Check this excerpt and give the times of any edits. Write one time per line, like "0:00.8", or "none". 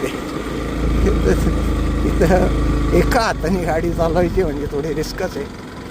none

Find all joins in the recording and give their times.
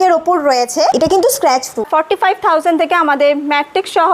0:01.9

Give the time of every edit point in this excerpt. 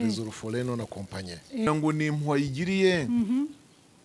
0:01.7

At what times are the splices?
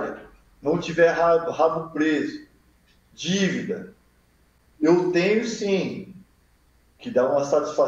0:04.5

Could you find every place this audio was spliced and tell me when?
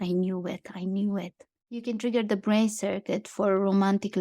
0:01.8

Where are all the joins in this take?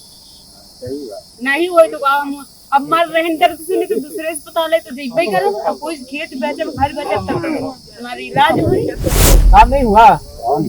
0:09.4

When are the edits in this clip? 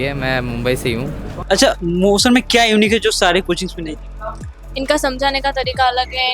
0:01.3

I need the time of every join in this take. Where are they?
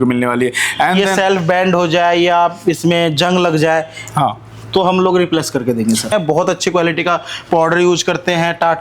0:06.1

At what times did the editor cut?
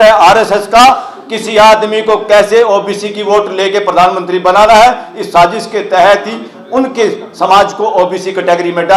none

